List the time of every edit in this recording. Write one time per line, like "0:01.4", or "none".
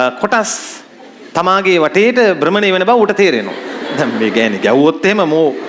0:03.9

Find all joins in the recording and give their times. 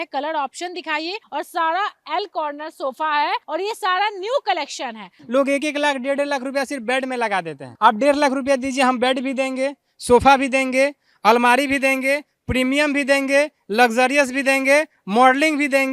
0:01.2
0:03.4
0:05.1

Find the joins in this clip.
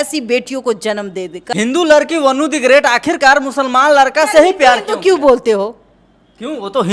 0:01.5

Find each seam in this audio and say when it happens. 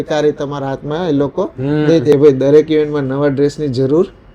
0:02.1

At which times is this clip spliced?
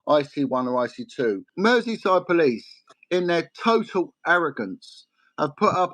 0:01.5

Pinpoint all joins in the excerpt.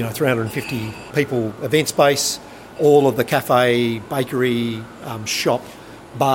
0:01.0
0:02.7

